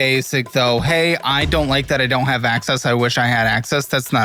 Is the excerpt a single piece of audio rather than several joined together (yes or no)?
yes